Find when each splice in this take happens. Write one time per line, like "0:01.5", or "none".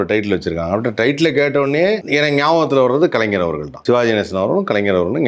0:02.0
0:03.7